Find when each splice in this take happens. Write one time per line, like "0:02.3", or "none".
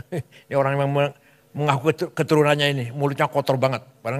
none